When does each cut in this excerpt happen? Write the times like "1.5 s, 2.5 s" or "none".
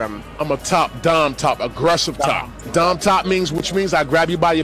2.6 s